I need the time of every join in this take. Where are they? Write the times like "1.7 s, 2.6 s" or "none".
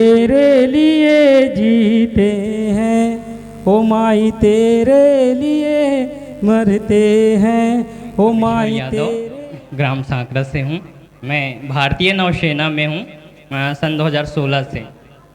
9.2 s